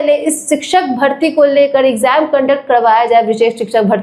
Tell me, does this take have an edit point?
no; 0 cuts

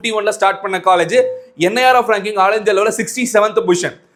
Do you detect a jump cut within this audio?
no; 0 cuts

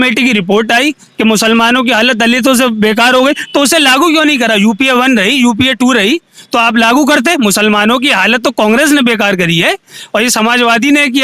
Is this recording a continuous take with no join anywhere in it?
yes; 0 cuts

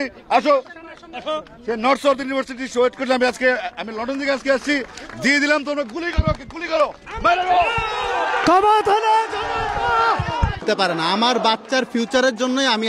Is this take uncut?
no; 1 cut; at 10.7 s

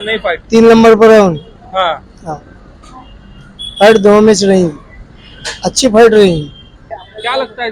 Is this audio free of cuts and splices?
yes; 0 cuts

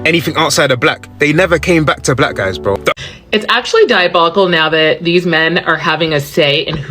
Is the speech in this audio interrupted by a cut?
yes; 1 cut; at 2.9 s

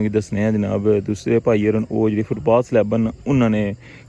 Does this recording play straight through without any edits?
yes; 0 cuts

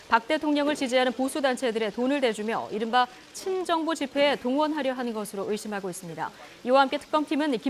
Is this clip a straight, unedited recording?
no; 1 cut; at 1.4 s

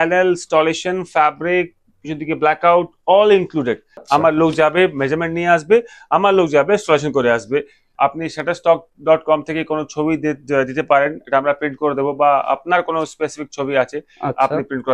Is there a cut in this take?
yes; 2 cuts; at 4.0 s, 7.8 s

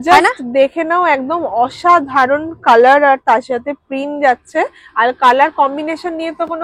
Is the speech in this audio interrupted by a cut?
no; 0 cuts

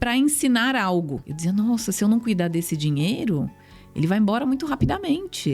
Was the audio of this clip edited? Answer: yes; 1 cut; at 1.2 s

